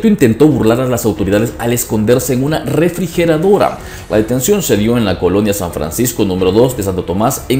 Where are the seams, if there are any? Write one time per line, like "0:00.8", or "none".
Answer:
none